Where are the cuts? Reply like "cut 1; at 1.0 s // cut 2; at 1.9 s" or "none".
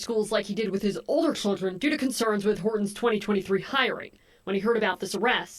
cut 1; at 4.6 s